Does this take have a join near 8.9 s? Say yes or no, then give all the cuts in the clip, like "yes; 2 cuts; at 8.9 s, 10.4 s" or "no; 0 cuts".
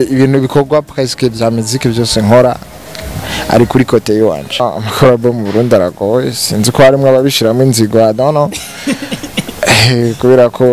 no; 1 cut; at 4.6 s